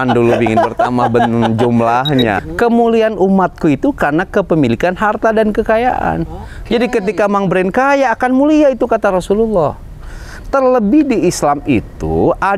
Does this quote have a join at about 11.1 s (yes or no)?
no